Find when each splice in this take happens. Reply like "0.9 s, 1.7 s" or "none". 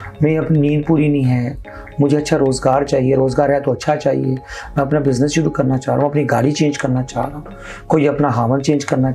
none

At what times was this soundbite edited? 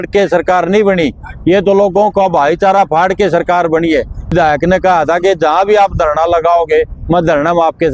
4.3 s

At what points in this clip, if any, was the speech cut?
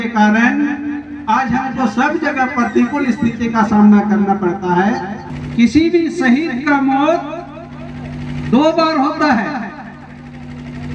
5.2 s

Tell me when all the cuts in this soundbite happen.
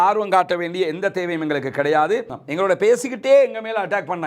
2.3 s

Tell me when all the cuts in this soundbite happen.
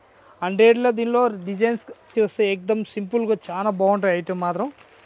2.1 s

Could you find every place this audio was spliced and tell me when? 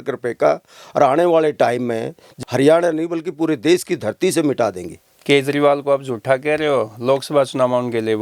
2.2 s

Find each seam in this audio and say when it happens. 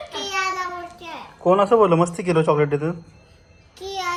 none

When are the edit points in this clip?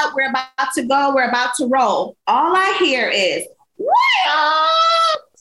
2.1 s

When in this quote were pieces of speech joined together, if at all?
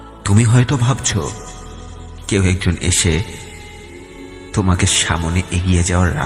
none

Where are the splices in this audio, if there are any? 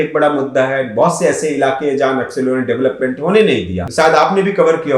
3.8 s

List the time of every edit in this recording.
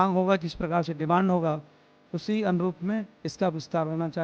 none

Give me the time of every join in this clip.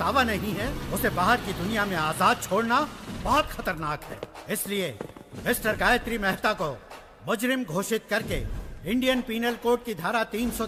none

